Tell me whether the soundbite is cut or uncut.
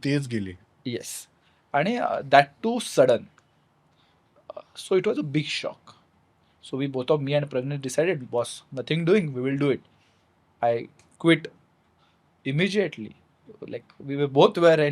uncut